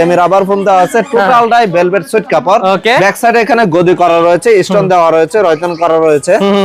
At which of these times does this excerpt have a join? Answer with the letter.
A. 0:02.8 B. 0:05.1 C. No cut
C